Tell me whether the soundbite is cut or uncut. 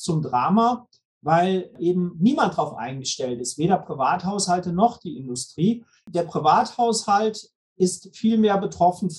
cut